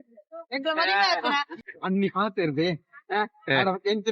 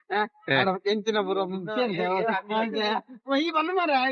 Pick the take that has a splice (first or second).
first